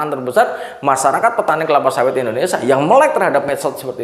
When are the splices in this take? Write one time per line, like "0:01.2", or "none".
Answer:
none

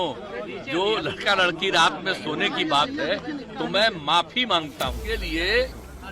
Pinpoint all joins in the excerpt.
0:05.0

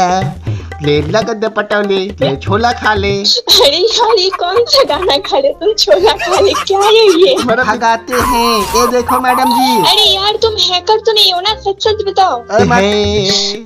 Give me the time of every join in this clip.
0:07.7
0:12.7

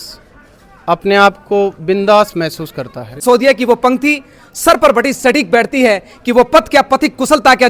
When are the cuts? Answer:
0:03.2

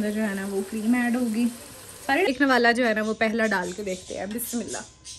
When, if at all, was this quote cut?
0:02.3

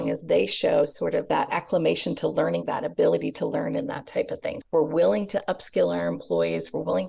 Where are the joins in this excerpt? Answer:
0:04.6

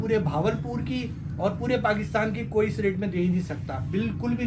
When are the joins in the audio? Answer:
none

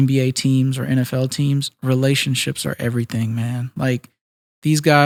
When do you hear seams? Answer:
none

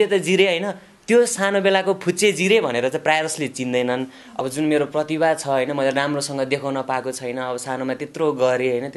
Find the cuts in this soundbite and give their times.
0:04.2

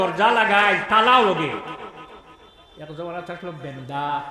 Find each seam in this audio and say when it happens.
none

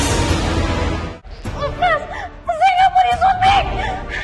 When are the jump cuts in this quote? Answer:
0:01.1

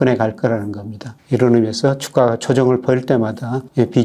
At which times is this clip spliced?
none

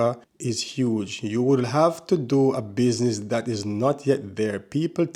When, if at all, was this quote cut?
none

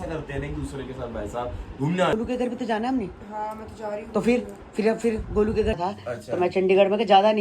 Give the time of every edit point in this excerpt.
0:02.1
0:05.8

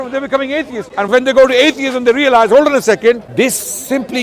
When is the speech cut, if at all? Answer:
0:01.1
0:03.2

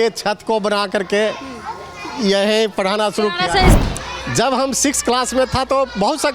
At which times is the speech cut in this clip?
0:03.7

